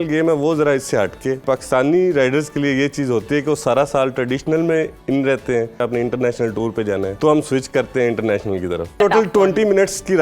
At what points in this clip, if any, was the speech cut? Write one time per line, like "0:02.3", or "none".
0:01.4
0:05.8
0:07.1
0:09.0